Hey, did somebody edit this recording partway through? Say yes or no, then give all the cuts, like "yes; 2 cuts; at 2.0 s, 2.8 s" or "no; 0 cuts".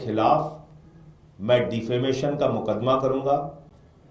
no; 0 cuts